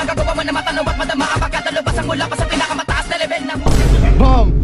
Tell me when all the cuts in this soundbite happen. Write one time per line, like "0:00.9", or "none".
none